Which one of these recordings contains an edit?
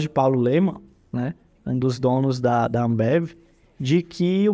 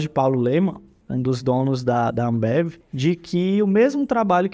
second; 2 cuts; at 0.9 s, 2.8 s

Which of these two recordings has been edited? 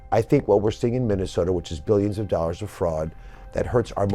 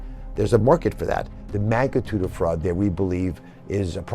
second; 1 cut; at 1.4 s

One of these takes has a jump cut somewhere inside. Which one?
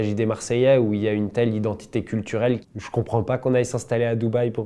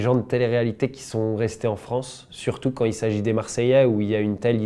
first; 1 cut; at 2.6 s

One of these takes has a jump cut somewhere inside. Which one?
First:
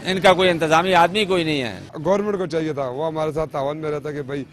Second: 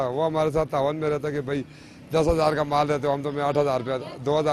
first; 1 cut; at 1.9 s

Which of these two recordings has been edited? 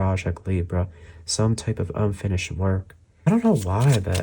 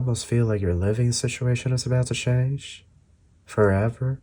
first; 1 cut; at 3.3 s

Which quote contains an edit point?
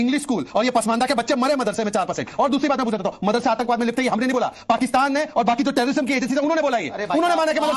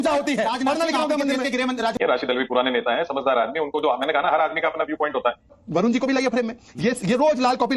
second; 1 cut; at 1.9 s

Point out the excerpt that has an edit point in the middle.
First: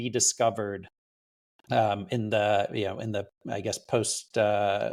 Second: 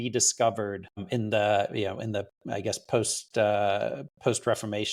second; 1 cut; at 1.0 s

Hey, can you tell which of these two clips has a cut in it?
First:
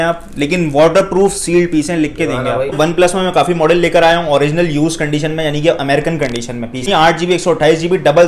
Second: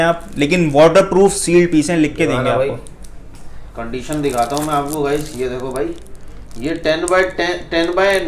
first; 2 cuts; at 2.8 s, 6.9 s

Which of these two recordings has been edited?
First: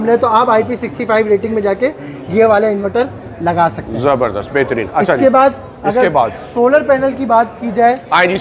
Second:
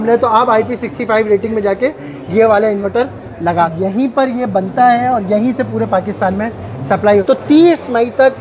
second; 2 cuts; at 3.8 s, 7.2 s

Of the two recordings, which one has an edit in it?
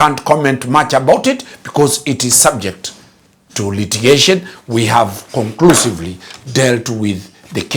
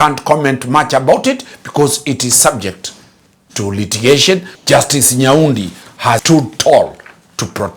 second; 2 cuts; at 4.5 s, 6.2 s

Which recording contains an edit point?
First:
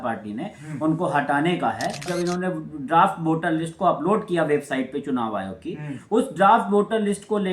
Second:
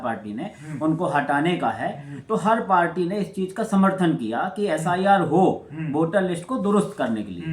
first; 1 cut; at 2.1 s

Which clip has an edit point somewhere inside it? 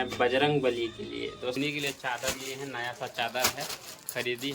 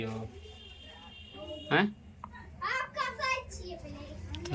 first; 1 cut; at 1.6 s

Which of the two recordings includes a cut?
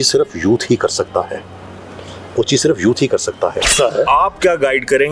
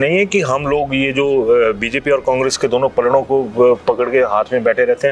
first; 1 cut; at 3.7 s

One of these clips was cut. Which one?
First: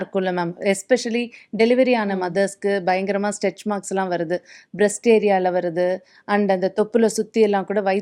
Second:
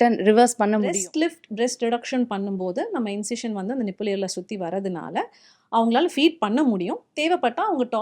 second; 1 cut; at 0.9 s

